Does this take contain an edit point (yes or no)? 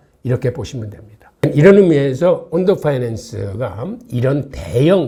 no